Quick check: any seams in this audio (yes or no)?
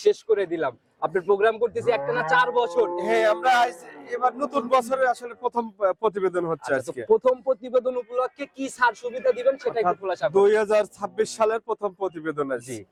no